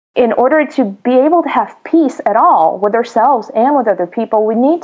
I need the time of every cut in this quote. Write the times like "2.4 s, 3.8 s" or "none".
1.0 s